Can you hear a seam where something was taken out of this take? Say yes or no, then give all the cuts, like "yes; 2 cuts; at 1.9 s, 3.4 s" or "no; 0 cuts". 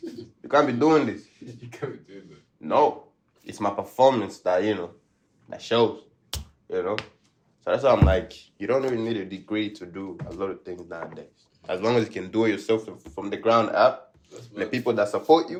no; 0 cuts